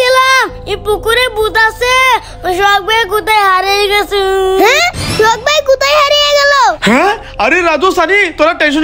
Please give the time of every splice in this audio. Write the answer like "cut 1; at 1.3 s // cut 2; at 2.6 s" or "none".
none